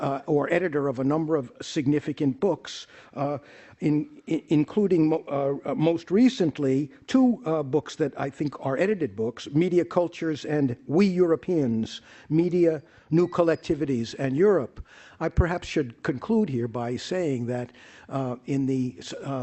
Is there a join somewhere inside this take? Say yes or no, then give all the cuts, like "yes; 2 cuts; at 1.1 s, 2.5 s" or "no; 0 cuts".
no; 0 cuts